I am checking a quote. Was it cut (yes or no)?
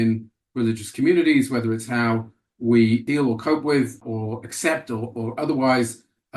yes